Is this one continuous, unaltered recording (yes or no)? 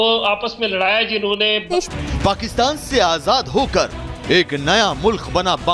no